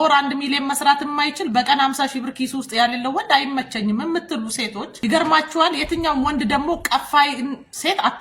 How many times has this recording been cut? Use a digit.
1